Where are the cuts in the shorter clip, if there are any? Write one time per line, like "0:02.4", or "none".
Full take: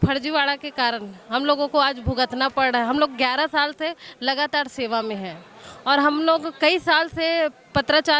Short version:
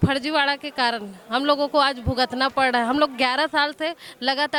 none

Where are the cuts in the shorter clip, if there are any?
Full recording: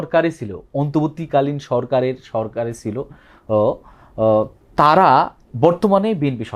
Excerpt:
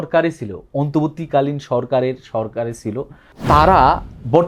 0:03.3

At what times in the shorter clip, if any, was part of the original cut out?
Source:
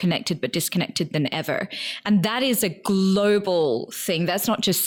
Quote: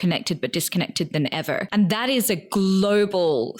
0:01.7

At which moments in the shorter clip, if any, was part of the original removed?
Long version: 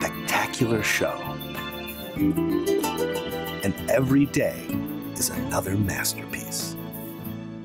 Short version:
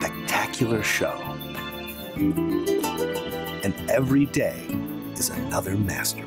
none

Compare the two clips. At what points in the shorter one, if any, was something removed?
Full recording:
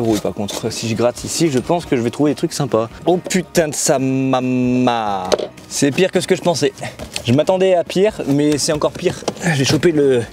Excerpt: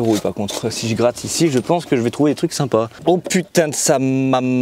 none

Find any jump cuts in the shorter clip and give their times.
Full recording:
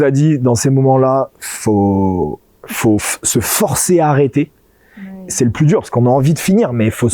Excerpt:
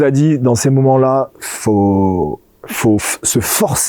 none

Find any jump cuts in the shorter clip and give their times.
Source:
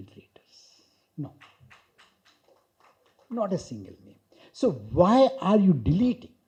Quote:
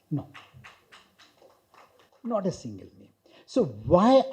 none

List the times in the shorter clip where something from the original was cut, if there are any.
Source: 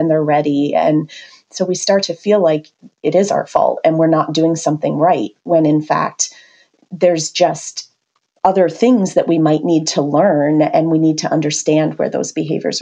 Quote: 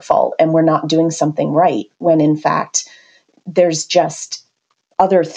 none

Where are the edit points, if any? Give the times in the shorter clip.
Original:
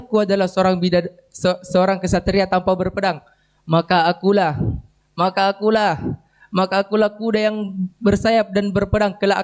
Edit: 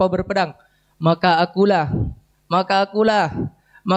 none

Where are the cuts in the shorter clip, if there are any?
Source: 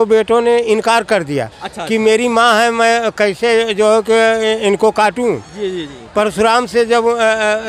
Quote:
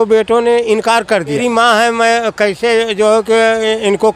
0:01.4

